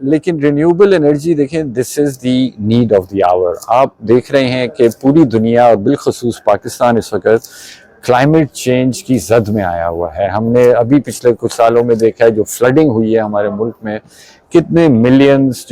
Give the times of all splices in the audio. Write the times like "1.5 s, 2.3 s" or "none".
none